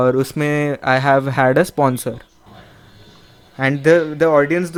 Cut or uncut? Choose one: uncut